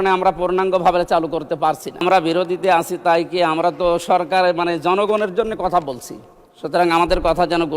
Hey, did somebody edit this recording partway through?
yes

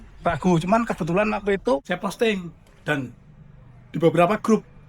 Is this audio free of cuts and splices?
no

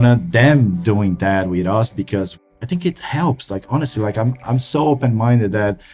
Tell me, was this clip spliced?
yes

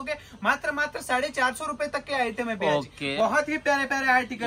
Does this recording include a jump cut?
no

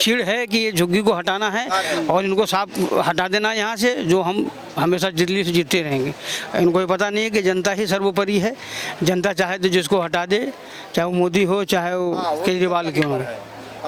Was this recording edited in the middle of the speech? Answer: no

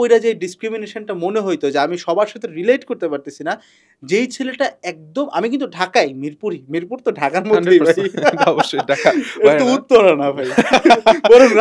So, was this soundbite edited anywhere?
no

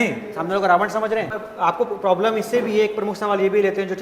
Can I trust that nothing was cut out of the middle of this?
no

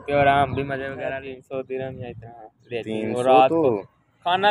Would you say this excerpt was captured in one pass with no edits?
no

